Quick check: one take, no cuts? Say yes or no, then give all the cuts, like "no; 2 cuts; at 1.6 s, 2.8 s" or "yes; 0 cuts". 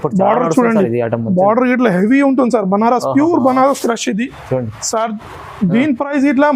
yes; 0 cuts